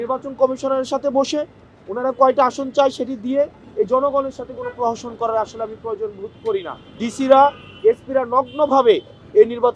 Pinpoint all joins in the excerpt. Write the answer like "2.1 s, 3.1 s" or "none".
6.8 s